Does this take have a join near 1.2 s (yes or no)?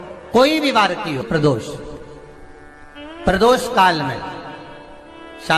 yes